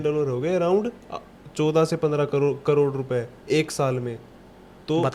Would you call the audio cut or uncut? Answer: uncut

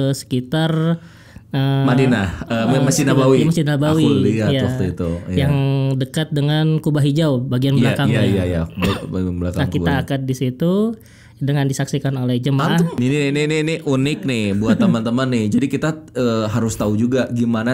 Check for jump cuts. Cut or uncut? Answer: cut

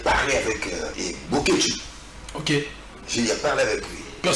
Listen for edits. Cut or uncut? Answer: cut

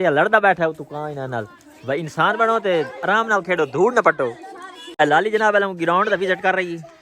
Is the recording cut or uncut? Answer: cut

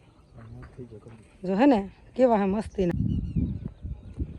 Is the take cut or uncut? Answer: cut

